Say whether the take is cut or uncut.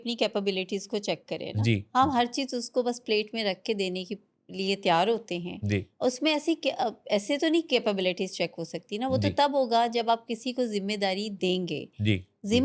uncut